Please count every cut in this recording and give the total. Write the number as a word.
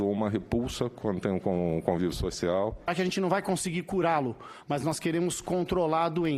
one